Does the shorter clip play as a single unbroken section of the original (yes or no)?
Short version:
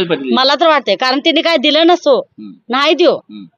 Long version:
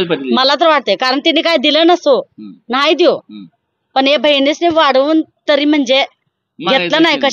yes